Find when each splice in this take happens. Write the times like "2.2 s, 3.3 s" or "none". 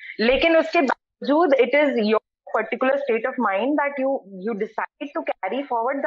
none